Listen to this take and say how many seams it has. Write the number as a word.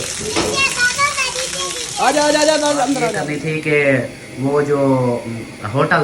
one